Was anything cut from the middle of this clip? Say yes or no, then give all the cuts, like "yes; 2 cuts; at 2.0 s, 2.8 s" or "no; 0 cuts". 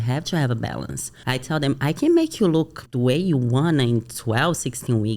yes; 2 cuts; at 1.1 s, 2.8 s